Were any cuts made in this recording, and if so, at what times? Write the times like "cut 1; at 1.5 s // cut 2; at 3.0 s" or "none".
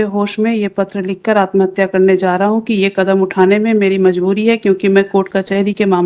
none